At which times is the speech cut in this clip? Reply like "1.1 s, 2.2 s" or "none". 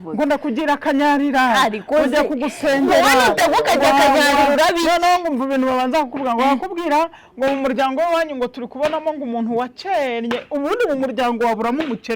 none